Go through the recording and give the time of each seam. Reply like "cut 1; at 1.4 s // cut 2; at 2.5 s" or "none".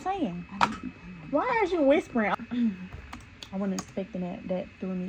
cut 1; at 2.3 s